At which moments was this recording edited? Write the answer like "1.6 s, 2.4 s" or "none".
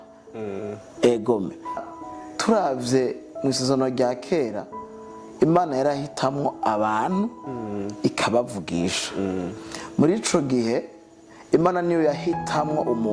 1.8 s